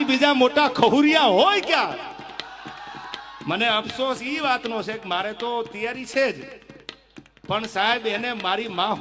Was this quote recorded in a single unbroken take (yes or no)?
yes